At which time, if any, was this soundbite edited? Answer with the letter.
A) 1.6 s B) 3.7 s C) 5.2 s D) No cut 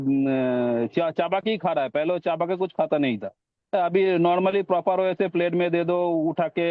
D